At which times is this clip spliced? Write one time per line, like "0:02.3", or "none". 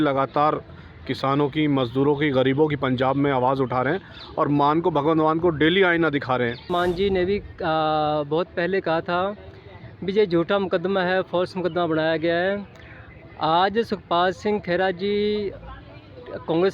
0:06.6